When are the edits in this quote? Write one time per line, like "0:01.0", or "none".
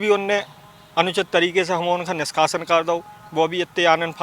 none